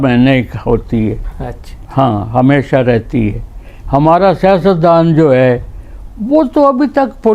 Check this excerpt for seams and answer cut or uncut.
uncut